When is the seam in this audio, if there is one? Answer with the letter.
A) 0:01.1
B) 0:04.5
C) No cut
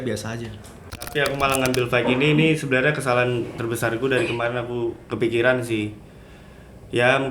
A